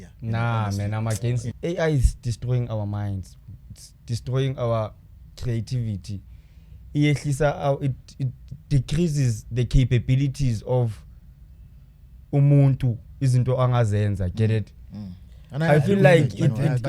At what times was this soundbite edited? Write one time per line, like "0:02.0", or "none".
0:01.4

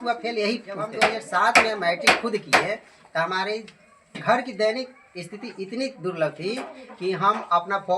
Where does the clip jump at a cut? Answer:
0:00.9

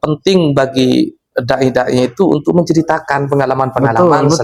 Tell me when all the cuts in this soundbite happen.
none

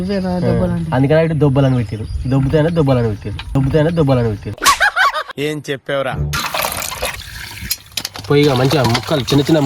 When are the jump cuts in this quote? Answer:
0:07.3

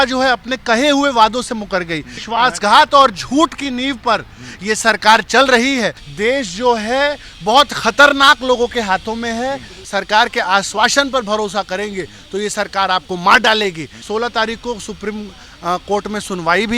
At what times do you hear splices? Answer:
0:02.2
0:06.0
0:09.8
0:13.9

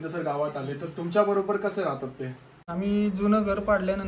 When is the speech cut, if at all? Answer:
0:02.7

